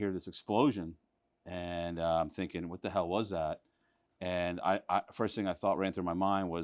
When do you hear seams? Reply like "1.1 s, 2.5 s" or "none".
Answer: none